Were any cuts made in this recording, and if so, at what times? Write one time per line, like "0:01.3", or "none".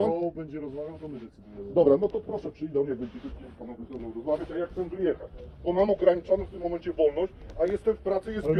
none